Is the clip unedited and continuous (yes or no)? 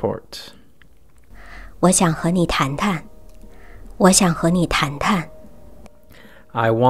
yes